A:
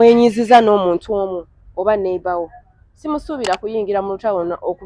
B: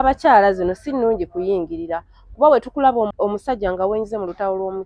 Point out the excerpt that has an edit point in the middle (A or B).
B